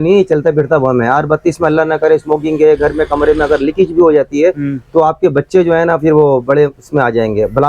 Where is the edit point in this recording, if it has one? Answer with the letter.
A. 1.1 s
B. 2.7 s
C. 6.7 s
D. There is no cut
D